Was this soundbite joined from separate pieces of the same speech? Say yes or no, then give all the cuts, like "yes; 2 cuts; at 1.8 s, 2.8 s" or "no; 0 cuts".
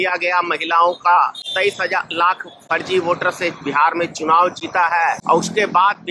yes; 2 cuts; at 1.4 s, 5.2 s